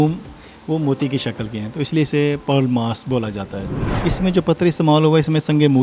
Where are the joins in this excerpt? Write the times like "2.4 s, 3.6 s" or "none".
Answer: 3.8 s